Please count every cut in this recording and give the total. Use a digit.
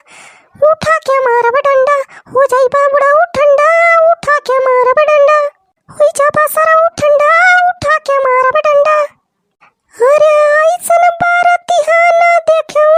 0